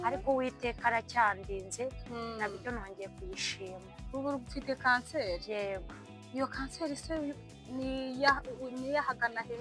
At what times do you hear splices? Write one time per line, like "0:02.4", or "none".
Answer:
none